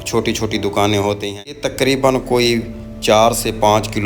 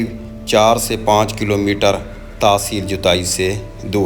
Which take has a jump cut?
first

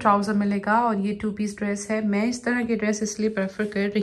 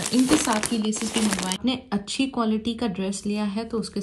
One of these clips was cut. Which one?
second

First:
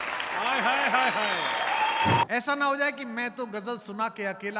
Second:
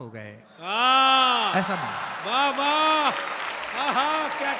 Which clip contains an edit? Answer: first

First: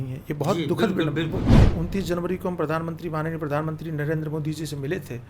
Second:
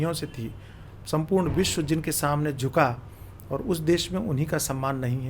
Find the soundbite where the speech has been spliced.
first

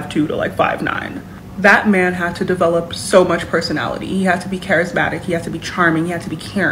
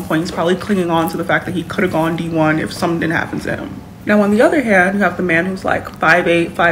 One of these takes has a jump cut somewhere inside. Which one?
second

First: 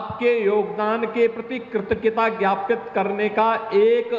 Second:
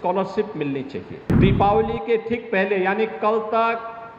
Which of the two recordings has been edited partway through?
second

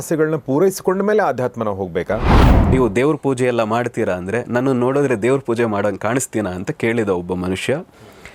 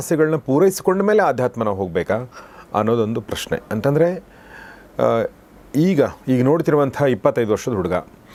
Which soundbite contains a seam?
first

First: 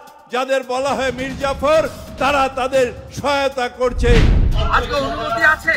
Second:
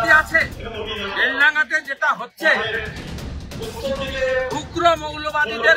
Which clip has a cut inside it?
first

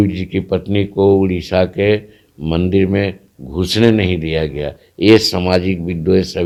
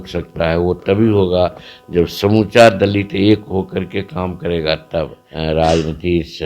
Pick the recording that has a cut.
second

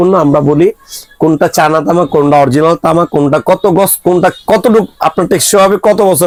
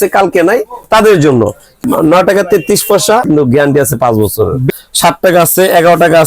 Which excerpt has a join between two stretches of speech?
second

